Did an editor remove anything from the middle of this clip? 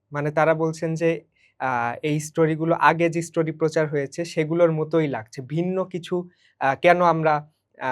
no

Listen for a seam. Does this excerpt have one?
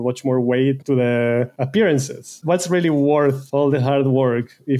yes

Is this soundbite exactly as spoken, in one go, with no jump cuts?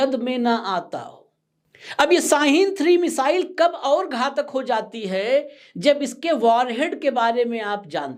yes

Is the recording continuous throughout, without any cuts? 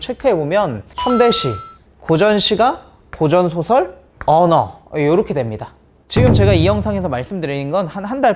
no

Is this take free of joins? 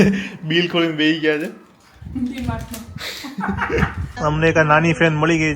no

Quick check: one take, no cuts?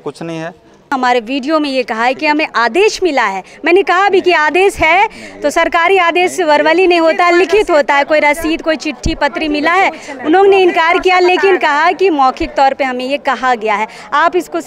no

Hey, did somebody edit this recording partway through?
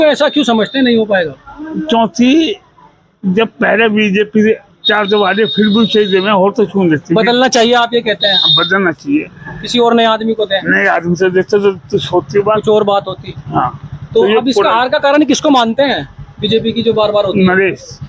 no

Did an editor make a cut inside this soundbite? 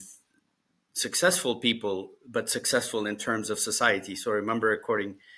no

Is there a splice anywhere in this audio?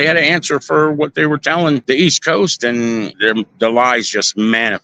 yes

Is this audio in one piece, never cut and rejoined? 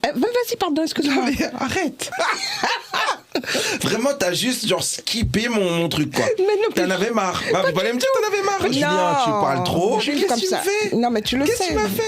no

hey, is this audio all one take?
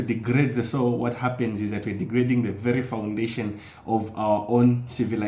yes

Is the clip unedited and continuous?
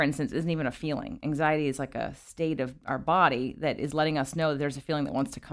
yes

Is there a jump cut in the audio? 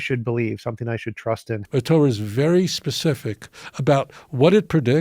yes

